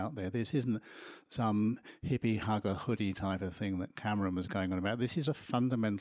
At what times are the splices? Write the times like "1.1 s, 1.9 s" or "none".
2.6 s